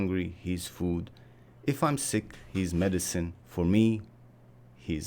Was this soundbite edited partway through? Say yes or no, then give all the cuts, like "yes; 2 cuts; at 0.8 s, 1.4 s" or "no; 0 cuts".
yes; 1 cut; at 3.4 s